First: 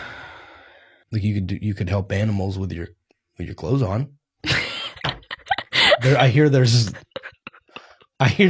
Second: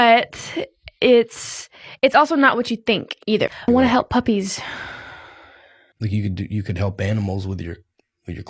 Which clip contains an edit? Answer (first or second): second